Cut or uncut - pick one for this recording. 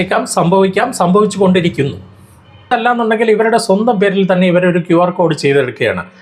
cut